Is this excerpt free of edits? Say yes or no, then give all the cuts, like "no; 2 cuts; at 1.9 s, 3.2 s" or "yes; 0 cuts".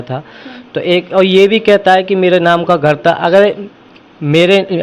yes; 0 cuts